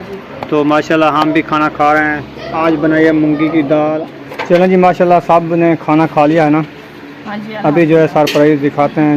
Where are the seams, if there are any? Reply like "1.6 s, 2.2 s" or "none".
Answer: 4.1 s